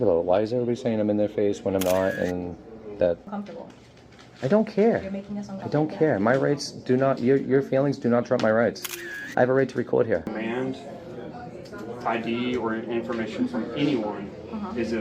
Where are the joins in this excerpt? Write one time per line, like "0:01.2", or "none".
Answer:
0:03.3
0:10.3